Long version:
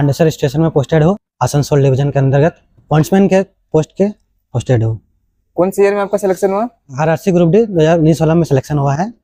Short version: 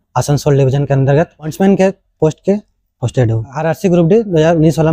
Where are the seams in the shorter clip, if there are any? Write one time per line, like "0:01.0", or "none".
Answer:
0:01.5
0:03.5